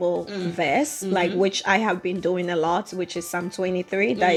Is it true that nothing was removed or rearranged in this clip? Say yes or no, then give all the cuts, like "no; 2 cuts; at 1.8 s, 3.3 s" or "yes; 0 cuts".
yes; 0 cuts